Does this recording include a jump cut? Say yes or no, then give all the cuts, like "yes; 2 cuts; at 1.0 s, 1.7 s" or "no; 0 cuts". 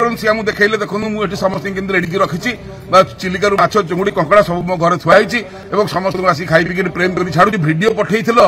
yes; 1 cut; at 7.5 s